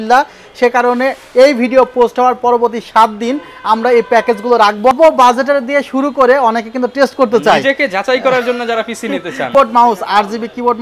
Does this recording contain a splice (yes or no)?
yes